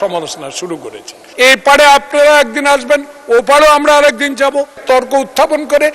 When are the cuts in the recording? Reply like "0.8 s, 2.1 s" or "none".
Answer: 1.2 s, 4.8 s

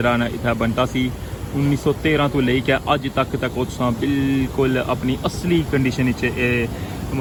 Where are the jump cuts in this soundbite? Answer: none

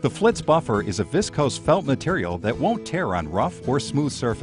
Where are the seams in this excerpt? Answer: none

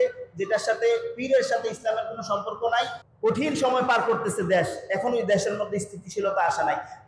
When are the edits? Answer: 3.0 s

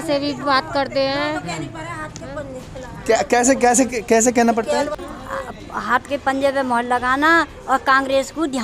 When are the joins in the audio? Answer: 5.0 s

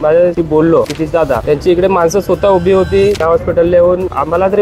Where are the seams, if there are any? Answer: 3.2 s

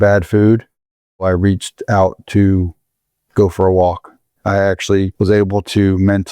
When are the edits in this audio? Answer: 1.2 s, 4.6 s

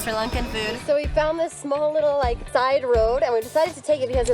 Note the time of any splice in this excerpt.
0.8 s, 2.4 s

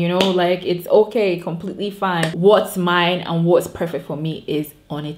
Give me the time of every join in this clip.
2.3 s

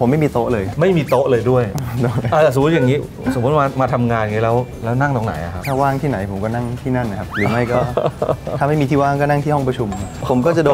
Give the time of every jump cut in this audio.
none

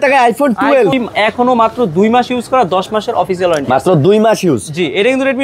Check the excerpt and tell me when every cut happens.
0.9 s

